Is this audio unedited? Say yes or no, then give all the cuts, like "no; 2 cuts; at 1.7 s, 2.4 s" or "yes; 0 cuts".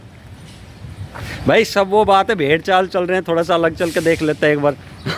yes; 0 cuts